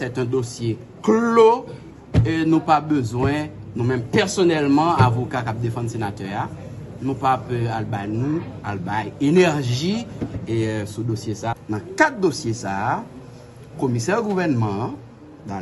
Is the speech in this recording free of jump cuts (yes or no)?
no